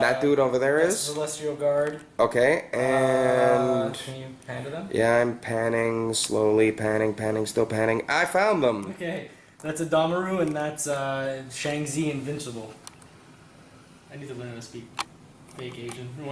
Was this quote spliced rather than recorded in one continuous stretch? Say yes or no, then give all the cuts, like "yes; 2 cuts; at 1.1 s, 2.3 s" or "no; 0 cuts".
yes; 1 cut; at 2.0 s